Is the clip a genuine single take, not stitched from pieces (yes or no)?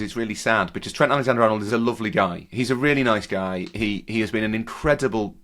no